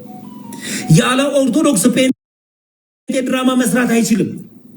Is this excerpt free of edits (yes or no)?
yes